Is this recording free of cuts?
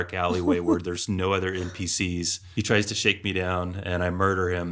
no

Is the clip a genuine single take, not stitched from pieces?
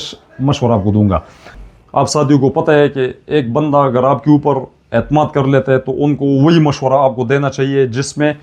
no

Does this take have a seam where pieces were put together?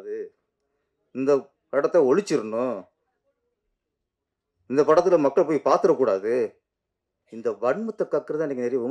no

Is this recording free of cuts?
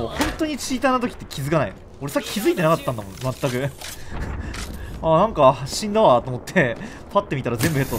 yes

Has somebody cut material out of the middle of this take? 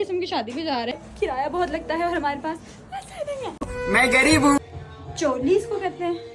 yes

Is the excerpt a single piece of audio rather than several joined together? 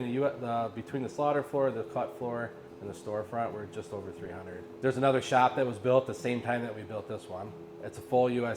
no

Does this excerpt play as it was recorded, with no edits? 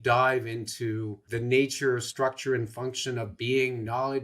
no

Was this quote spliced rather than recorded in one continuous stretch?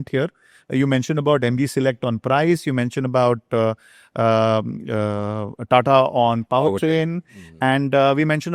no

